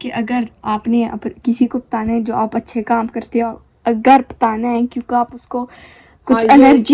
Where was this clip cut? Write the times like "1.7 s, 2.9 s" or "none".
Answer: none